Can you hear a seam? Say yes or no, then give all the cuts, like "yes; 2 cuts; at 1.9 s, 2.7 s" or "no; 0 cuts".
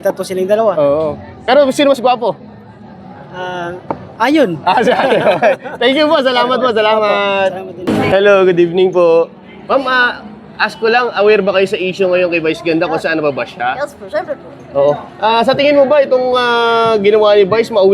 no; 0 cuts